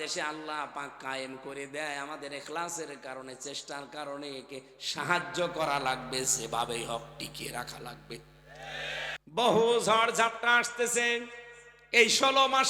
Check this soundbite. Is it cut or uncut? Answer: cut